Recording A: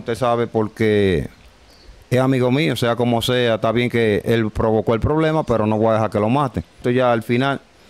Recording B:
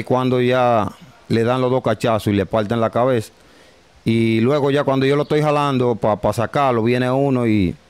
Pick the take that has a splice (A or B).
A